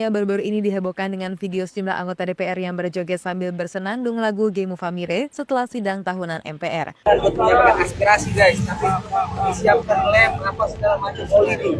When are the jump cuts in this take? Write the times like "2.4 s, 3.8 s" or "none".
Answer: 7.1 s